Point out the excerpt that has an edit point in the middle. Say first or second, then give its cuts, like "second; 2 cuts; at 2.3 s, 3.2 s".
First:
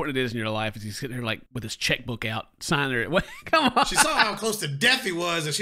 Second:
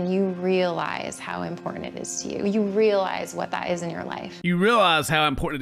first; 1 cut; at 4.0 s